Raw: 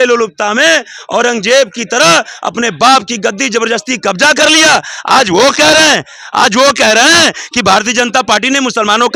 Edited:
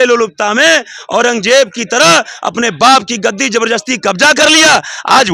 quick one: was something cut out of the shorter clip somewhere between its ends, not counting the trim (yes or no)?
no